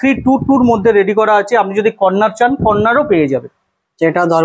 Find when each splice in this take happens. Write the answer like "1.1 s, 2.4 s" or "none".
none